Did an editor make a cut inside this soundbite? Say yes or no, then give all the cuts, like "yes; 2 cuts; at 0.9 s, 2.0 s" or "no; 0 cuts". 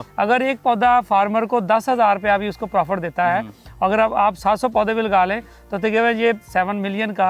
yes; 1 cut; at 6.4 s